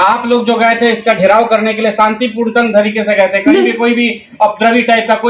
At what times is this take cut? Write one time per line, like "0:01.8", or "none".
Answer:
none